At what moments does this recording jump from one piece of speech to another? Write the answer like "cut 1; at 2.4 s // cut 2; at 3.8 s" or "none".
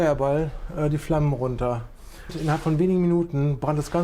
cut 1; at 2.4 s